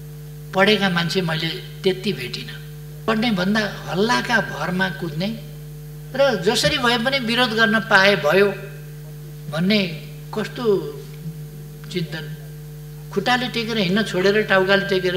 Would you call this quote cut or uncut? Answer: cut